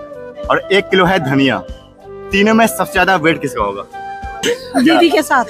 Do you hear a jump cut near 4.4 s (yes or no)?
yes